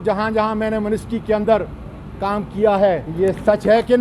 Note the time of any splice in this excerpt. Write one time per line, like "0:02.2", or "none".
0:03.1